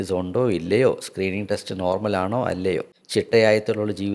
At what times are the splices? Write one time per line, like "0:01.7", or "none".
0:03.0